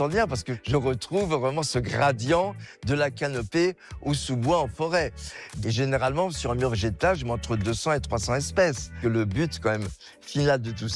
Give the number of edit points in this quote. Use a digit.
1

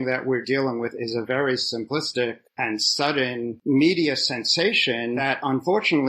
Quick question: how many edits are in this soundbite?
2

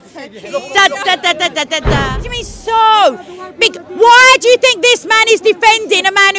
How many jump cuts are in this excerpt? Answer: 1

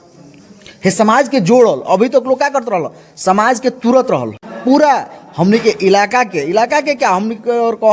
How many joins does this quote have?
1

